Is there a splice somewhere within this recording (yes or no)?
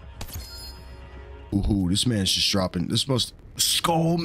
yes